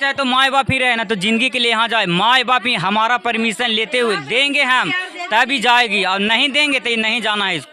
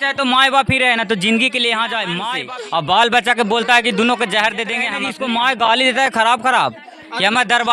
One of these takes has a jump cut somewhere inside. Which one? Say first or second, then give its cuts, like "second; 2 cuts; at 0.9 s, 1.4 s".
second; 2 cuts; at 2.3 s, 5.0 s